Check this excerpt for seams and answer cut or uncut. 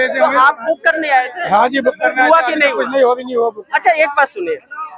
uncut